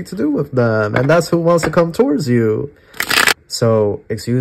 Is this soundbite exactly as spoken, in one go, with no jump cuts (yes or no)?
no